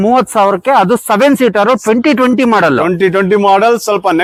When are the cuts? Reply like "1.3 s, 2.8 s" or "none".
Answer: none